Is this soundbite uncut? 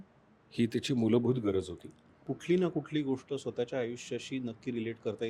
no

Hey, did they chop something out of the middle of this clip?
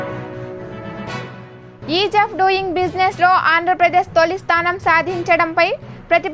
yes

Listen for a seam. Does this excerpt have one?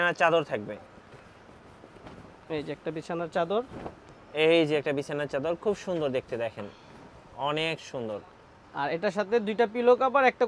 no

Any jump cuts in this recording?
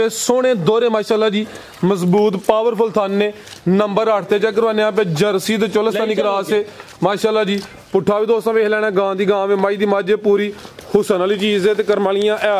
no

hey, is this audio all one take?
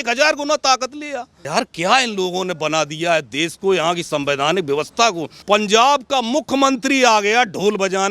no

